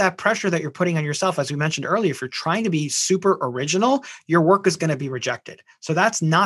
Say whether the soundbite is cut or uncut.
uncut